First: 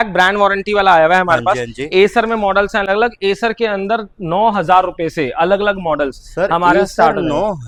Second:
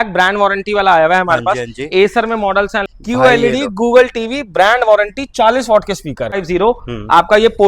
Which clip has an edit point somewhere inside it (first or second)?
second